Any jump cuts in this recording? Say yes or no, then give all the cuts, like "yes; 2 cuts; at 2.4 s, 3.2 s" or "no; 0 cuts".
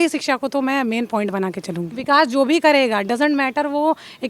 yes; 1 cut; at 1.9 s